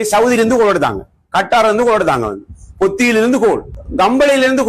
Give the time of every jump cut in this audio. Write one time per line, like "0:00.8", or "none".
0:03.8